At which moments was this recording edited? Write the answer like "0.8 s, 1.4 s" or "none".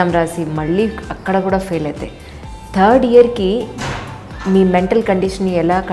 none